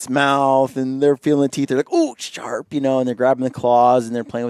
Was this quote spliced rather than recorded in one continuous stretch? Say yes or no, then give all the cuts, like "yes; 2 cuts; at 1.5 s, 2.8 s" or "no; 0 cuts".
no; 0 cuts